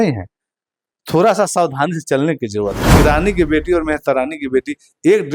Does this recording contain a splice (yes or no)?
yes